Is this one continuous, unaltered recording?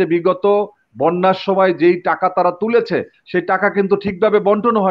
yes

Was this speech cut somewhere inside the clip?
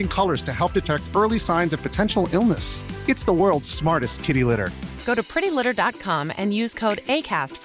no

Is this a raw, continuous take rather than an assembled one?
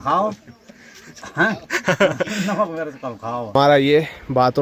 no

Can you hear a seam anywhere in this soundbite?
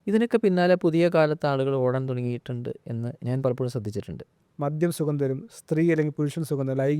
yes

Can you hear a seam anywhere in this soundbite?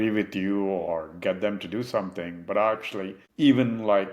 yes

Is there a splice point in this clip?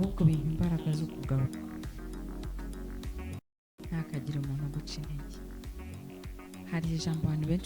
yes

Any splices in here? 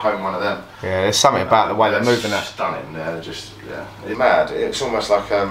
yes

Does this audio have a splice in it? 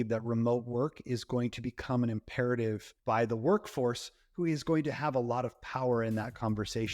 yes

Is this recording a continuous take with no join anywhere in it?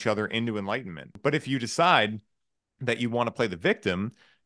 yes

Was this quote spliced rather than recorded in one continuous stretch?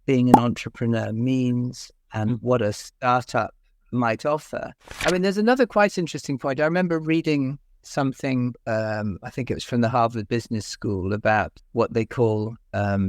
yes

